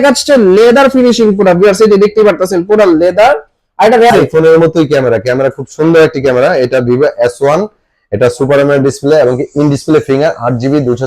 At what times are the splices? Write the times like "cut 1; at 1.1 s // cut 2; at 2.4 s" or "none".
cut 1; at 4.1 s